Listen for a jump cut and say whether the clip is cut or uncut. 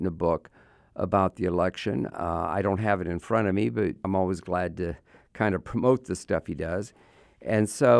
cut